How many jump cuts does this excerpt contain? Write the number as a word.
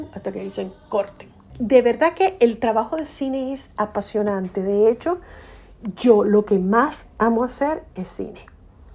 one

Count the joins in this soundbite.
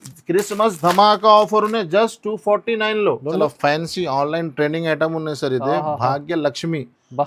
one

